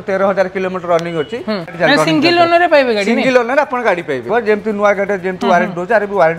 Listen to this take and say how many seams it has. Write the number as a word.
two